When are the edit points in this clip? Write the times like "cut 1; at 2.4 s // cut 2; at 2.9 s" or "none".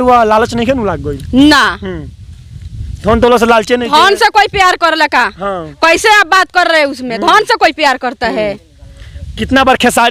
none